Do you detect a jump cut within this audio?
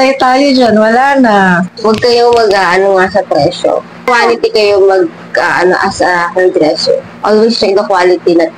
yes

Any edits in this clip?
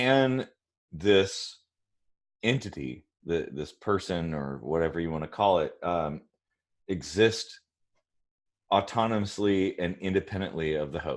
no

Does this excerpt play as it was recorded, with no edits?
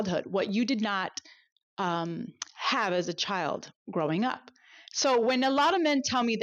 yes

